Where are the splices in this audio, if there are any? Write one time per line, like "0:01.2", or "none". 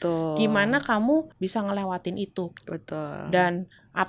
0:01.3